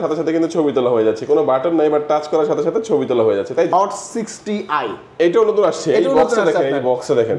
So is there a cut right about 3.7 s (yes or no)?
yes